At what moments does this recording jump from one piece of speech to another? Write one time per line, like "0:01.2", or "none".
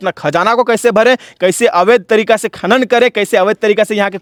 none